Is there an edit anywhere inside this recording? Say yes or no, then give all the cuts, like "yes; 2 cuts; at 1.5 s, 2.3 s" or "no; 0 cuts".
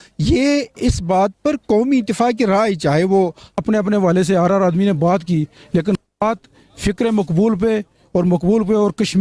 yes; 1 cut; at 3.6 s